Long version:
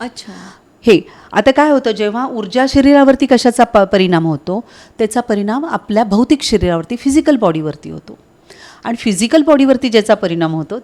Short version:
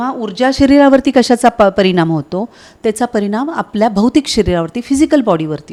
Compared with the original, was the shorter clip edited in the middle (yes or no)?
no